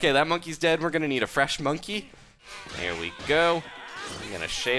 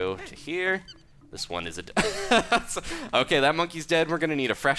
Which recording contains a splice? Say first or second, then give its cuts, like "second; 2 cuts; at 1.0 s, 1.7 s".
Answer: first; 1 cut; at 2.5 s